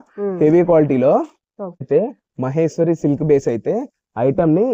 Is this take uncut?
no; 1 cut; at 1.9 s

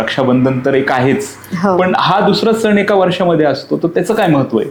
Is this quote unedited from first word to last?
yes; 0 cuts

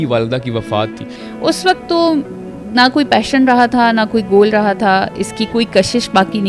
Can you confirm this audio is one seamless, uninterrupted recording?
no; 1 cut; at 1.2 s

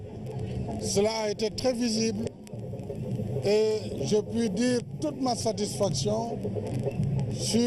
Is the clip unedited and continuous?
no; 1 cut; at 5.4 s

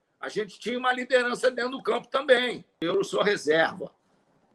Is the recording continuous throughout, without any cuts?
no; 1 cut; at 2.7 s

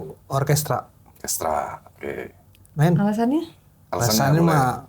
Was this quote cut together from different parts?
no; 0 cuts

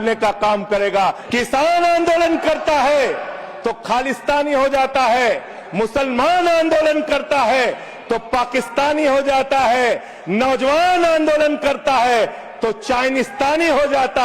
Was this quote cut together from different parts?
yes; 1 cut; at 1.2 s

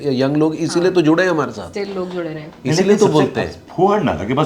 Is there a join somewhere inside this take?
no; 0 cuts

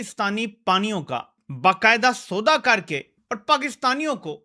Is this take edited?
no; 0 cuts

